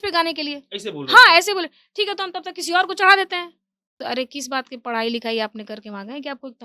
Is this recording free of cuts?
no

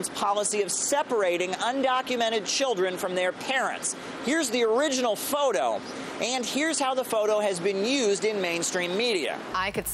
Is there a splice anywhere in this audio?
yes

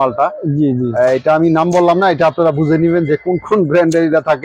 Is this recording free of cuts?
yes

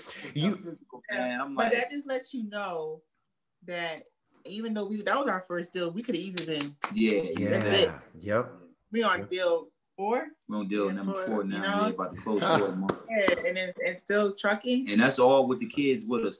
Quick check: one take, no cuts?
yes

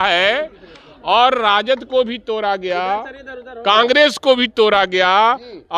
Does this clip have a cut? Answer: no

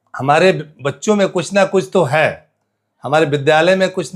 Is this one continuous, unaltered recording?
yes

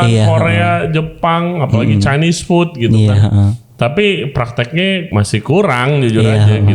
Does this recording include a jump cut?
yes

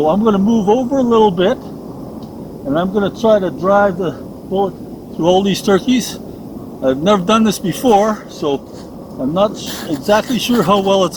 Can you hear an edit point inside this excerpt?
no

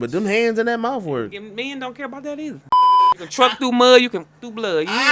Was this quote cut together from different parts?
yes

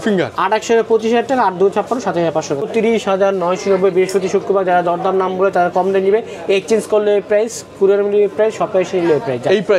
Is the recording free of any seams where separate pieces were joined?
no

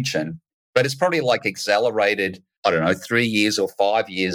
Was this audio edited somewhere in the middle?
yes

